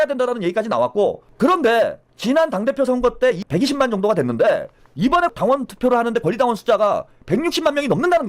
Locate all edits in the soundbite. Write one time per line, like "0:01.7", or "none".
0:01.3
0:02.1
0:03.4
0:05.2